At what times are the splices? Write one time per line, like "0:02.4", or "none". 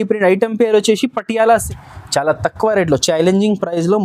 0:01.7

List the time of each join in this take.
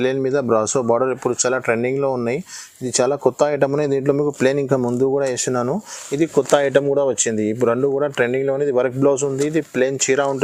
none

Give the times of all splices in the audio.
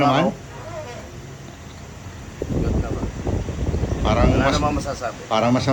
0:02.4

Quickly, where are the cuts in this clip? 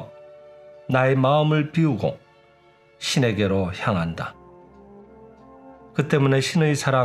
0:04.4
0:06.0

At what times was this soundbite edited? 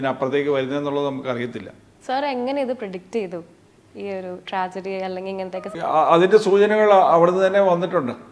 none

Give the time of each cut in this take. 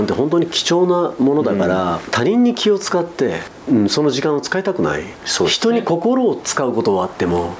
0:02.1
0:03.5
0:05.1

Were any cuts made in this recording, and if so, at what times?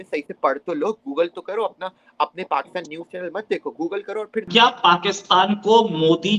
0:04.5

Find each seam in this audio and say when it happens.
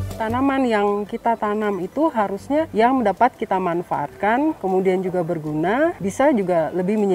0:02.7
0:04.6
0:06.0

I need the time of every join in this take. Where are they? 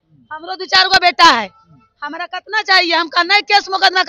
none

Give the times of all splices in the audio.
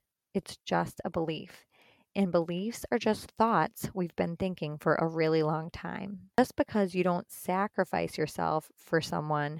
0:06.4

